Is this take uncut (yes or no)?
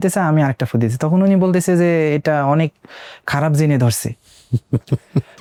yes